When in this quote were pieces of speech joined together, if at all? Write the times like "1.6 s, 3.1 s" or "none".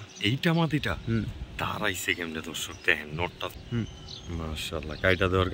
3.5 s